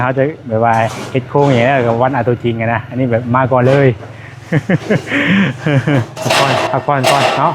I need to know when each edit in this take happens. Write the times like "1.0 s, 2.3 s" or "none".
6.2 s